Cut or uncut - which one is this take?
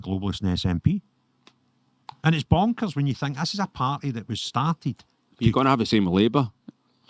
uncut